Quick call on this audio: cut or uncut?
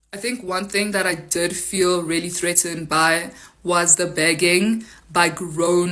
uncut